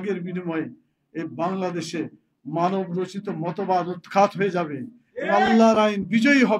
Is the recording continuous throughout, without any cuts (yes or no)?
yes